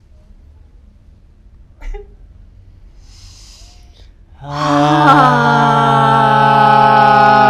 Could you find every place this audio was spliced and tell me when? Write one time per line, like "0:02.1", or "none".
none